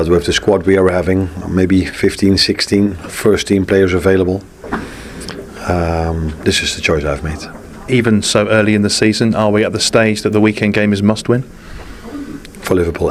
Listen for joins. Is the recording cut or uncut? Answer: uncut